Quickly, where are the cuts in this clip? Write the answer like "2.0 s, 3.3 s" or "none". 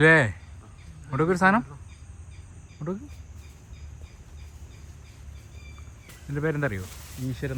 none

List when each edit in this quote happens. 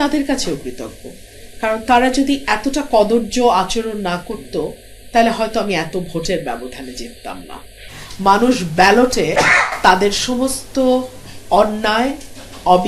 none

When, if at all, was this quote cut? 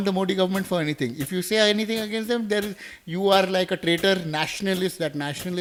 none

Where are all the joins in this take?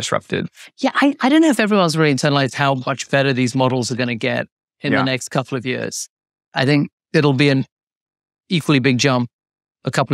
6.5 s

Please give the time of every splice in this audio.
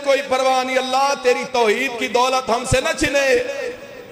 none

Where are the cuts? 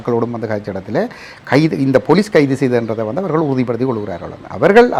none

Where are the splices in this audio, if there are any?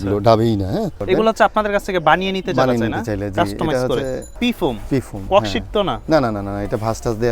1.0 s, 4.3 s

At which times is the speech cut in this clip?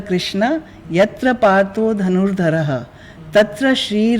none

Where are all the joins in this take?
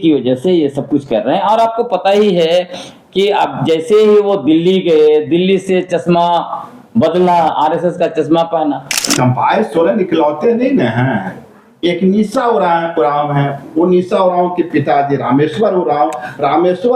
9.1 s

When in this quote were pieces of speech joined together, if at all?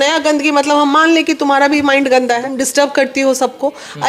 2.5 s

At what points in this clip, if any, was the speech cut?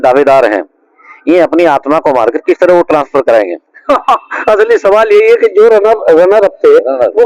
none

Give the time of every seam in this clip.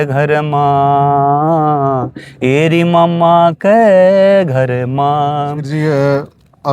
5.7 s

